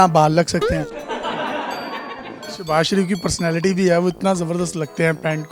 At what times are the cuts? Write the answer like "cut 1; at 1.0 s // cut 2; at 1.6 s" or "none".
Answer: cut 1; at 1.0 s // cut 2; at 2.6 s